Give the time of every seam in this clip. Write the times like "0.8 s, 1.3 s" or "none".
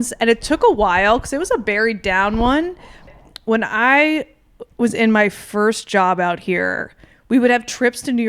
3.1 s